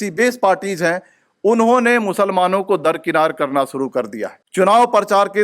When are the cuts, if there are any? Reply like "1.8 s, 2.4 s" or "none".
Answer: 4.4 s